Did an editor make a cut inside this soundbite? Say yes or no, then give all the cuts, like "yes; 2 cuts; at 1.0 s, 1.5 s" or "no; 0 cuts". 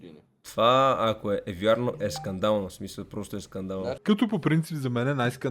yes; 1 cut; at 3.9 s